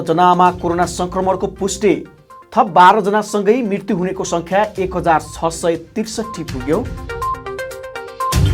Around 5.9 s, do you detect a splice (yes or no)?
no